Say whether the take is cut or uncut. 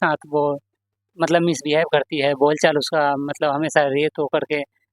uncut